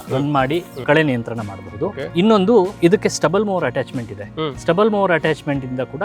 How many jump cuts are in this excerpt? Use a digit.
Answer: 0